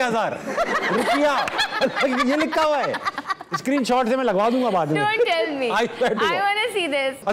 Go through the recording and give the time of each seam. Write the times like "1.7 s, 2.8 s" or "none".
none